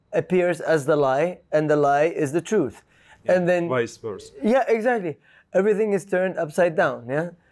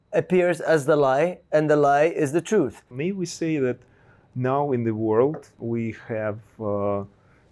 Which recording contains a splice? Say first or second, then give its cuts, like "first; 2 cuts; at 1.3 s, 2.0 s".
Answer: second; 2 cuts; at 2.9 s, 5.6 s